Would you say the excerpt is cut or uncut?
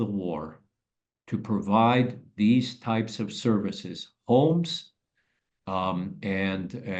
uncut